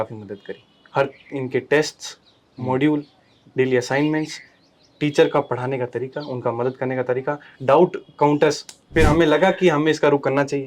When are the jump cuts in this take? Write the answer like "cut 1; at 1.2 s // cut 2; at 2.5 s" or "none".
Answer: cut 1; at 8.9 s